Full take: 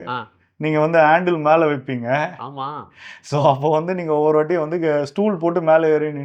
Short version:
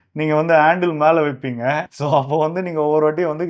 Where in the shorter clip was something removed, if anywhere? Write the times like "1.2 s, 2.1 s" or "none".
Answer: 1.9 s